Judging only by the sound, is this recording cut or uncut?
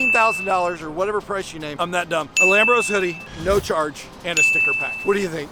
uncut